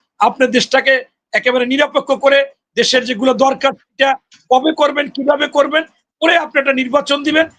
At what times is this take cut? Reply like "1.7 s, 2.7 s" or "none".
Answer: none